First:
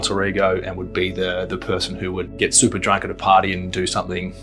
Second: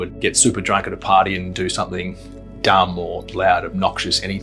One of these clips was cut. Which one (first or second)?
second